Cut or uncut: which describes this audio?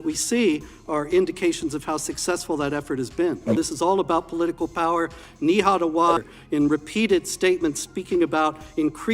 cut